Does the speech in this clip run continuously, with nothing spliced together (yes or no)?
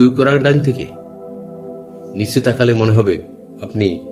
yes